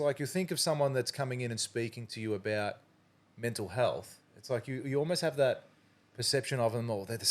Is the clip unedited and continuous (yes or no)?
yes